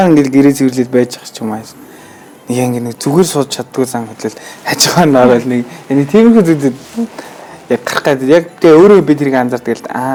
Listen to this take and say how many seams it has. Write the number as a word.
zero